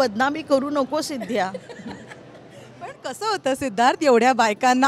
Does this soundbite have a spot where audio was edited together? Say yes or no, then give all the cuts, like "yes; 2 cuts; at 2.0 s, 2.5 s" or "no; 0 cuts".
no; 0 cuts